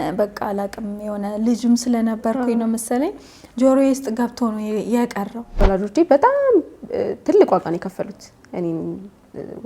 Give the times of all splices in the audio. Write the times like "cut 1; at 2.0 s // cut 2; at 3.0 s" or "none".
cut 1; at 5.6 s